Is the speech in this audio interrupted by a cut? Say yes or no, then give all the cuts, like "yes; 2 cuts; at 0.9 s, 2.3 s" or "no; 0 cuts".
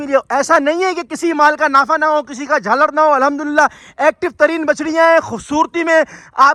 no; 0 cuts